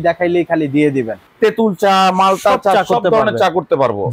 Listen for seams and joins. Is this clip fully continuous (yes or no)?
no